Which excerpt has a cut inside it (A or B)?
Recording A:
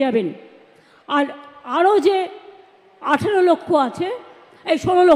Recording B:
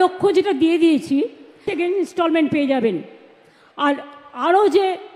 B